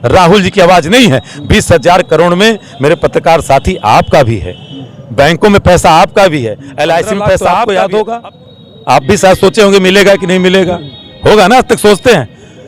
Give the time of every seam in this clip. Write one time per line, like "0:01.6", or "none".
0:07.4